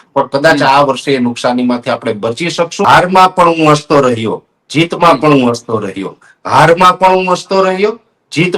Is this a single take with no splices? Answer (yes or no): no